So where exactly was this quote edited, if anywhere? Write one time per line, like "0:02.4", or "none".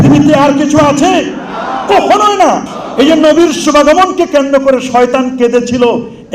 0:02.6